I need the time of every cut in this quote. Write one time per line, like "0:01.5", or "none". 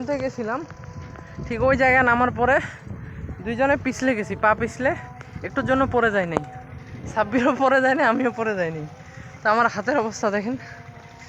none